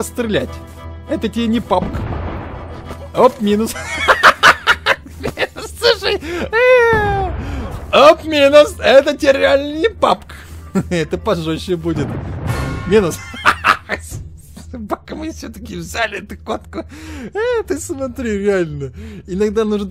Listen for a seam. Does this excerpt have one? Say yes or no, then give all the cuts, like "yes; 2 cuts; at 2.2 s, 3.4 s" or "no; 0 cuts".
no; 0 cuts